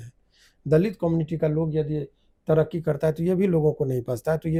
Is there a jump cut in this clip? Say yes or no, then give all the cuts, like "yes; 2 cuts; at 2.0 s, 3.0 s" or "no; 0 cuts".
no; 0 cuts